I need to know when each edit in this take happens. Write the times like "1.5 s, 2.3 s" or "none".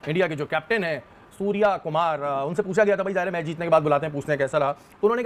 none